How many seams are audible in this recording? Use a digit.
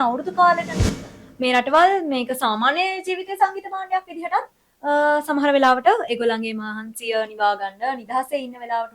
1